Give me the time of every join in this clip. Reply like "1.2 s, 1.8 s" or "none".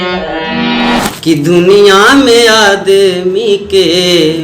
1.0 s